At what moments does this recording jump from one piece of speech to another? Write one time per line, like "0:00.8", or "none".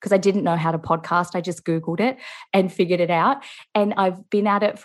none